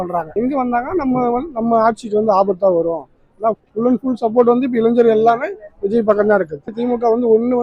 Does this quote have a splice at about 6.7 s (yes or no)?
yes